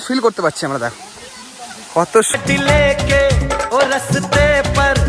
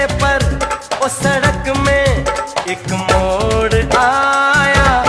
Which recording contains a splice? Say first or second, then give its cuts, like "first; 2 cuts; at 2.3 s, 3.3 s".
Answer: first; 1 cut; at 2.4 s